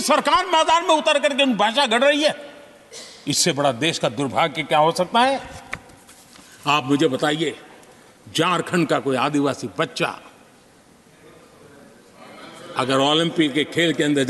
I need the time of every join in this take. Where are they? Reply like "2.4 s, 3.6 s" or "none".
none